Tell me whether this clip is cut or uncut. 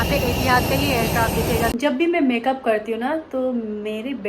cut